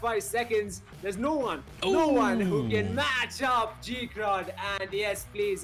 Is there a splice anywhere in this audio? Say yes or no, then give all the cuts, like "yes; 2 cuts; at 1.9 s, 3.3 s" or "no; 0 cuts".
no; 0 cuts